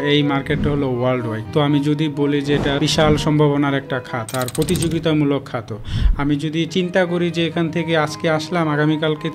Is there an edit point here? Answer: yes; 2 cuts; at 1.4 s, 2.8 s

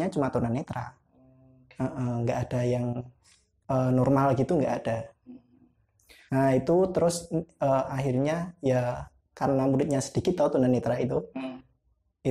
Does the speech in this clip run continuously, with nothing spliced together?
yes; 0 cuts

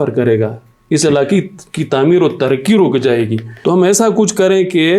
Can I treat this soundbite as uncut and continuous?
no; 1 cut; at 3.4 s

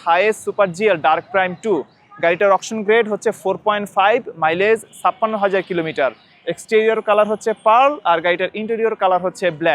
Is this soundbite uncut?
yes; 0 cuts

